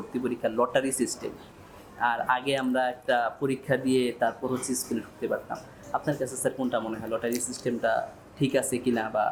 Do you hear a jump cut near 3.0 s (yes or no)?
no